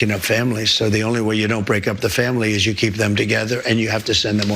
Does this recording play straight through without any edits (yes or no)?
yes